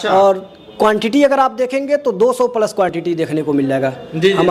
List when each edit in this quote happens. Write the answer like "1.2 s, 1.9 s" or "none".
none